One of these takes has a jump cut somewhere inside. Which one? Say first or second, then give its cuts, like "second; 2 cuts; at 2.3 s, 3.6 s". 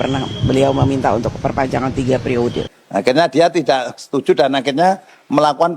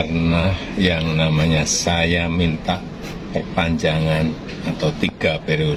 first; 1 cut; at 2.7 s